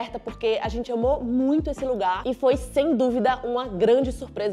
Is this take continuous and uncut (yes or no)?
yes